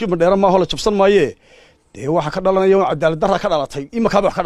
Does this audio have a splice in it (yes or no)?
no